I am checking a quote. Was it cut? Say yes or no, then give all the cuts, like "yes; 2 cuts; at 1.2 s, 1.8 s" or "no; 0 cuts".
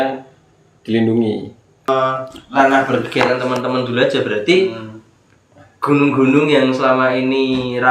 yes; 1 cut; at 1.9 s